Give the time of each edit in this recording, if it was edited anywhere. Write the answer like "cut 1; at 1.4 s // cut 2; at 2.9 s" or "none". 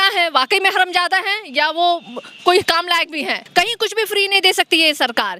cut 1; at 3.4 s